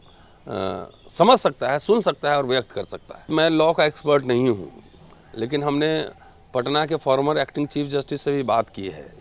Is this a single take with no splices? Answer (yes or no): no